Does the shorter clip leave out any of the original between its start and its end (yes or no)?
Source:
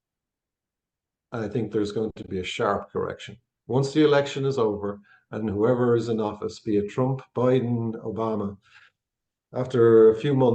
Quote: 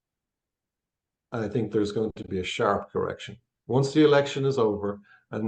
no